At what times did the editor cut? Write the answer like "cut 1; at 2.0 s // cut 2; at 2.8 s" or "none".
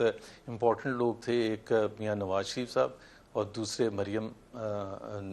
none